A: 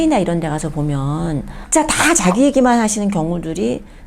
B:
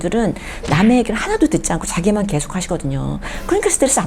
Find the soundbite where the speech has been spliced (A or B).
A